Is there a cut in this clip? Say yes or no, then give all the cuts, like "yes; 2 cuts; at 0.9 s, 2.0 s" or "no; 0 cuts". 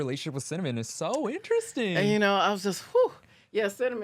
no; 0 cuts